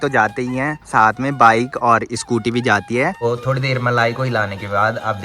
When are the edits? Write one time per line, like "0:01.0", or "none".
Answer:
0:03.2